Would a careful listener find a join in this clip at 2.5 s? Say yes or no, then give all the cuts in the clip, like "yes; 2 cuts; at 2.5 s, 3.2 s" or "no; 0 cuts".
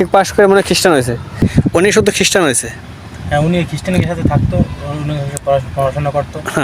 no; 1 cut; at 1.3 s